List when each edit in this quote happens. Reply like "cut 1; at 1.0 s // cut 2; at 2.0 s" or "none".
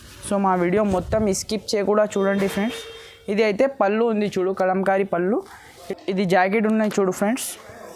cut 1; at 5.8 s